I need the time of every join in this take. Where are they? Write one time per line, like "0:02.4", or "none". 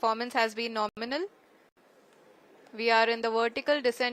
none